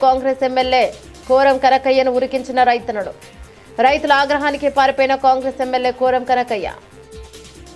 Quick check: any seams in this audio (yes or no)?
no